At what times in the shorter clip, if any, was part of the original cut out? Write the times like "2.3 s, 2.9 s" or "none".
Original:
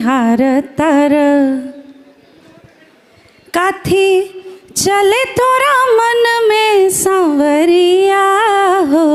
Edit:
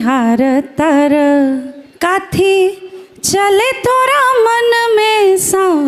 1.8 s